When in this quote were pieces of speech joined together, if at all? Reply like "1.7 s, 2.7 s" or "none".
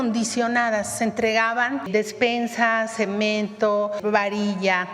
1.9 s, 4.0 s